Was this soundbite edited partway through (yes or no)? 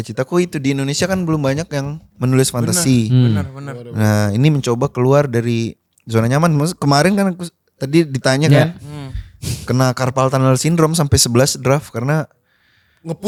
no